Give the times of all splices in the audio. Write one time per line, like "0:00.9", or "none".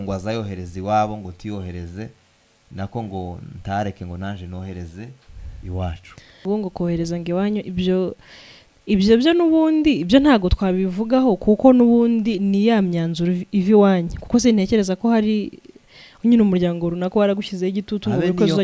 0:06.4